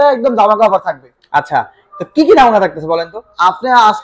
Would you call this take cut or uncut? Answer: uncut